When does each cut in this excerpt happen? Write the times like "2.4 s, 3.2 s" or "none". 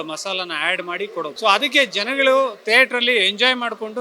1.3 s